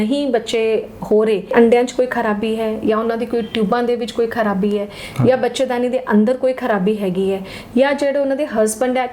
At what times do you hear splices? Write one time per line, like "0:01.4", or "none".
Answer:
0:01.5